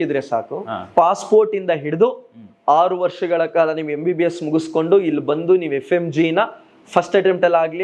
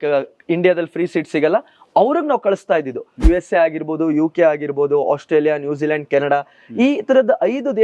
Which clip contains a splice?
second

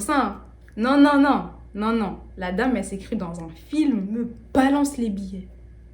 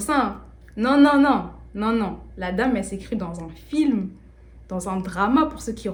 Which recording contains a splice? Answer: first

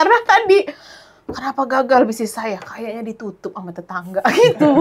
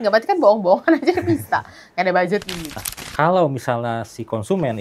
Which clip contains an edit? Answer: second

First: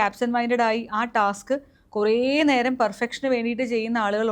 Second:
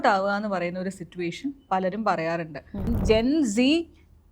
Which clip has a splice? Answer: second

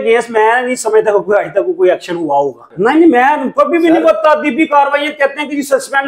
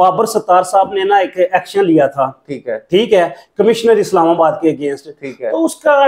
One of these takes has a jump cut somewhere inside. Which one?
first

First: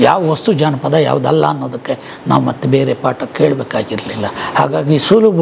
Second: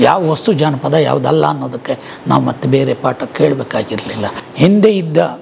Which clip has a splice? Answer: second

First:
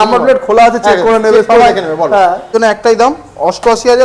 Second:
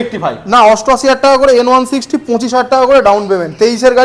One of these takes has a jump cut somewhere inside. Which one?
first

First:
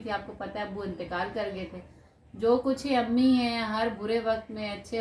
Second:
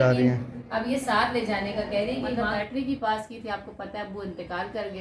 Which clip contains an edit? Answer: second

